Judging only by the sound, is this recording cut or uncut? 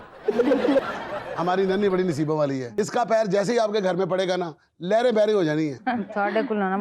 cut